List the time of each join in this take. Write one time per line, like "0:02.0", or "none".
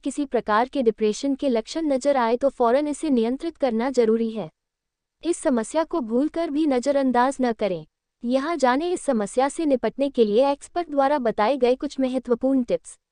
none